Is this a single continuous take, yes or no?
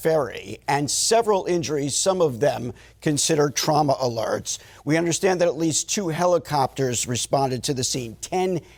yes